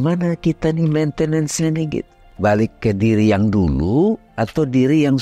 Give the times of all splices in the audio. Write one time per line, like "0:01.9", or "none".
0:02.2